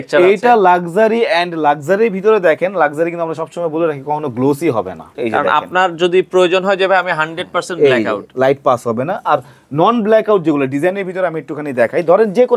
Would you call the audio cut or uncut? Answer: cut